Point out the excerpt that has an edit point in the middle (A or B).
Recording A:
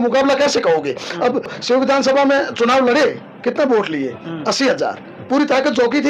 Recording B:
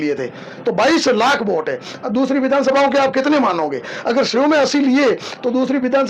A